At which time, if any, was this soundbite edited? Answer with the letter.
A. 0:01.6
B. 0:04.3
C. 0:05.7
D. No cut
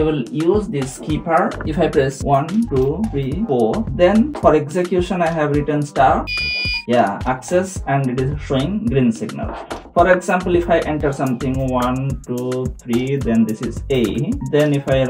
A